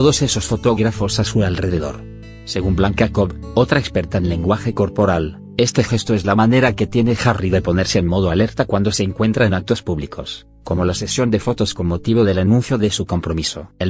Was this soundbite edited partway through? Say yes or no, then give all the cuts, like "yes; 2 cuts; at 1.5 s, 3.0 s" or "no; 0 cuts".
yes; 1 cut; at 1.6 s